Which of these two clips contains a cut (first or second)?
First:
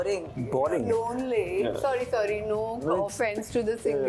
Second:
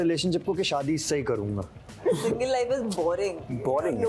second